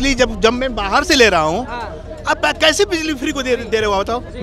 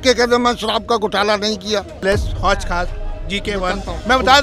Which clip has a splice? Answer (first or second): second